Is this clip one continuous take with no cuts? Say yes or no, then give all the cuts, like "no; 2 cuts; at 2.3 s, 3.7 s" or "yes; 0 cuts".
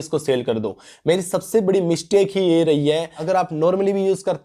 no; 1 cut; at 3.1 s